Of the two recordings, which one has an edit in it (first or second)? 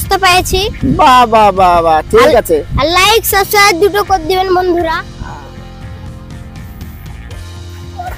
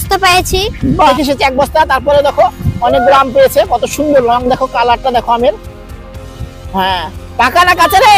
second